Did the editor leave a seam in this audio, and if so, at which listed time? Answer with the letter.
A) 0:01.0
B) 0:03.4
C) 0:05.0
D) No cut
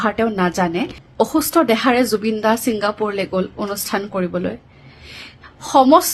A